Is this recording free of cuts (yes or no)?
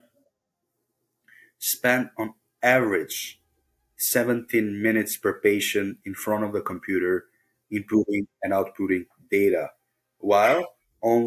yes